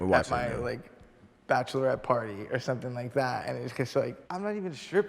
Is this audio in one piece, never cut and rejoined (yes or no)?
yes